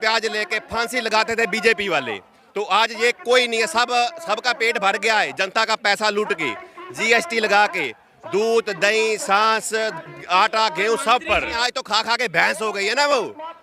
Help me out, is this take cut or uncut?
cut